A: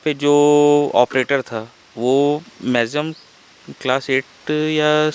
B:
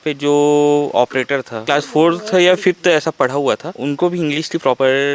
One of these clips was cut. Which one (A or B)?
B